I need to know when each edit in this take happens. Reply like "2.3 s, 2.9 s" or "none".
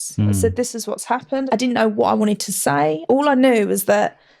1.4 s, 3.0 s